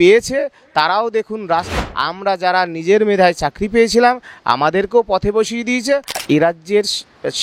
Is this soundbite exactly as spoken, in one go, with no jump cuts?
no; 2 cuts; at 1.7 s, 6.1 s

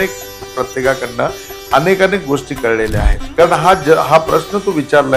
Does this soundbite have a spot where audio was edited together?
yes; 1 cut; at 3.1 s

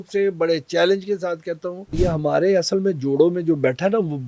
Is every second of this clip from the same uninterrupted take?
no; 1 cut; at 1.8 s

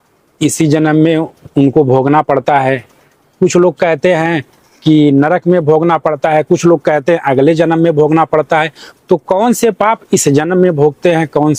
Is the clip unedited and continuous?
yes; 0 cuts

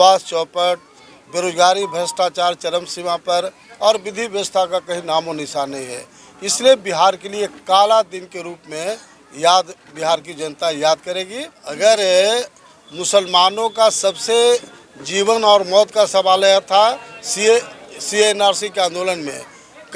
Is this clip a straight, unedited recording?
no; 1 cut; at 11.8 s

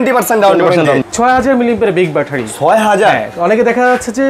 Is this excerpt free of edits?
no; 1 cut; at 1.0 s

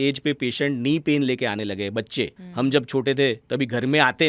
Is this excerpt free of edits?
no; 1 cut; at 2.4 s

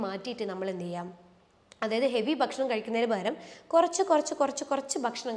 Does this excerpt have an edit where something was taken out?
no; 0 cuts

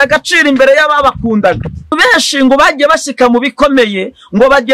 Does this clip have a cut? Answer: yes; 1 cut; at 2.0 s

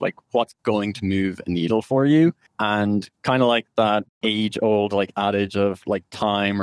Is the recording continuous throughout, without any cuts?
no; 2 cuts; at 2.5 s, 4.1 s

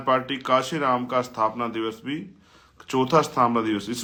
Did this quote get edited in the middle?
no; 0 cuts

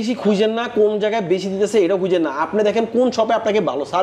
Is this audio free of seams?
yes; 0 cuts

